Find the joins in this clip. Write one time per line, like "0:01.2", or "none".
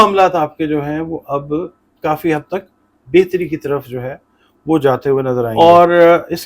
0:05.5